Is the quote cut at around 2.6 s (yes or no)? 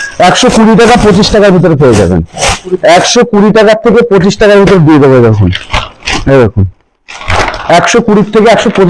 no